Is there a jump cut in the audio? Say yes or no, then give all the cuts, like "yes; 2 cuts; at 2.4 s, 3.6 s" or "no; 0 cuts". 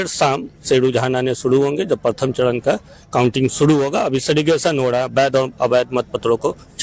no; 0 cuts